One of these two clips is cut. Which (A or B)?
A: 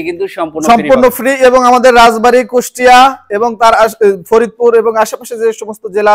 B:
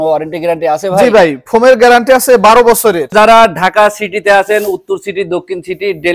B